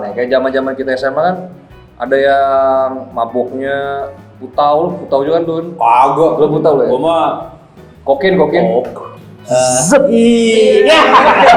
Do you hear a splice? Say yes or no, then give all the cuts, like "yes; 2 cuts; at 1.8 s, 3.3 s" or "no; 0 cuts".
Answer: no; 0 cuts